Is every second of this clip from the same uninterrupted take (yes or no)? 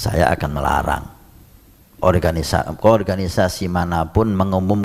yes